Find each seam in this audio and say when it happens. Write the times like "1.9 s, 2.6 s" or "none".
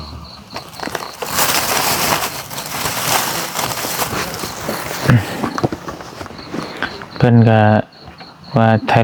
none